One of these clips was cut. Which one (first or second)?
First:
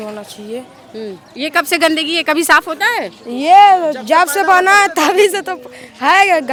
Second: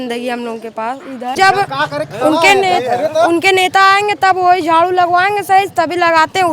second